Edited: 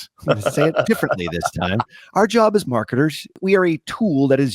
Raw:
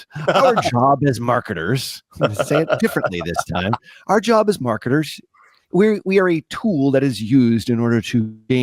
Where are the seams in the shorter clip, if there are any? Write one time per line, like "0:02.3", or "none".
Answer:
0:03.4